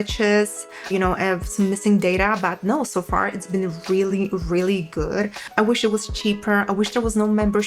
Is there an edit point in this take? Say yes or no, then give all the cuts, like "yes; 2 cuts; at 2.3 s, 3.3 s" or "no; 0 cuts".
yes; 1 cut; at 5.4 s